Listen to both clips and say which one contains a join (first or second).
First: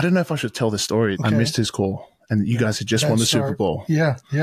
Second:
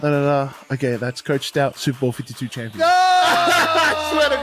first